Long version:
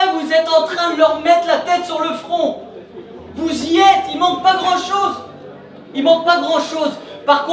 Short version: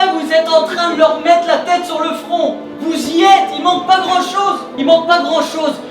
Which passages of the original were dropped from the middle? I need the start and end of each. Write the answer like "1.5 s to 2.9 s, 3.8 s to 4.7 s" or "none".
2.7 s to 3.2 s, 5.2 s to 5.8 s